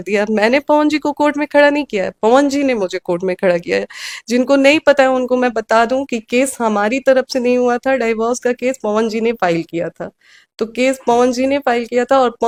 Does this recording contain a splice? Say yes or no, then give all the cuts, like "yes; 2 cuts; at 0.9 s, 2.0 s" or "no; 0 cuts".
no; 0 cuts